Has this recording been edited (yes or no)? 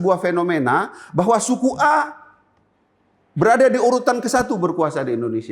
no